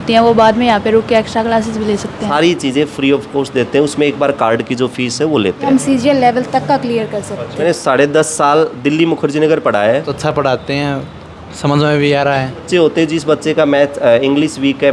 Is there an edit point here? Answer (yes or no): yes